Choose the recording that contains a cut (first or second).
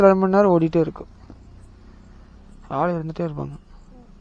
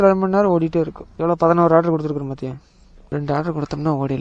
second